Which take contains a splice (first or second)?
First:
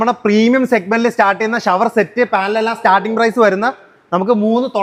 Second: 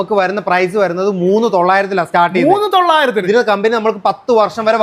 second